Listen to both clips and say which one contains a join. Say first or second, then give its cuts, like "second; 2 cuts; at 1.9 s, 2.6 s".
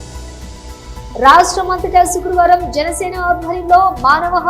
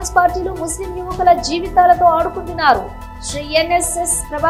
first; 1 cut; at 1.0 s